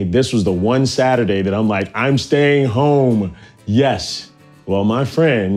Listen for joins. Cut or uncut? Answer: uncut